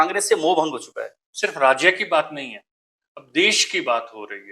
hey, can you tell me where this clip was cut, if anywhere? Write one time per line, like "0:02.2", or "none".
0:01.2